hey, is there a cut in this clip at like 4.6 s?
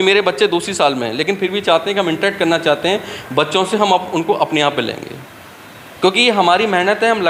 no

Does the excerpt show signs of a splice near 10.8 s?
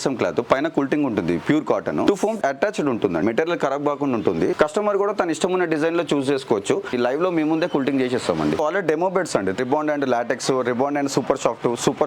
no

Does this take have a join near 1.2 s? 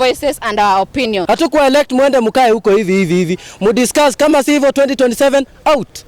yes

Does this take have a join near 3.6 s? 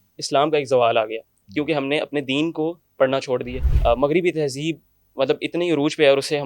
yes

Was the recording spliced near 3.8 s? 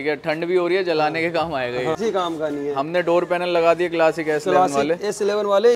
no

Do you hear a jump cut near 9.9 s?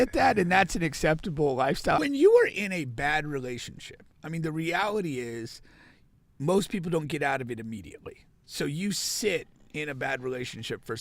no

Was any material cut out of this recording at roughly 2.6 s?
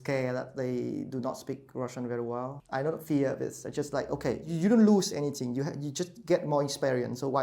yes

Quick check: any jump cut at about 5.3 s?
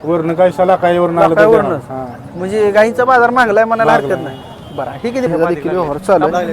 yes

